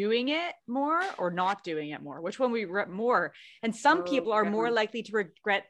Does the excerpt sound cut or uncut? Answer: uncut